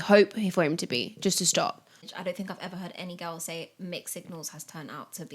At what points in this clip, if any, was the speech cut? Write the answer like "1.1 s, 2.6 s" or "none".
2.1 s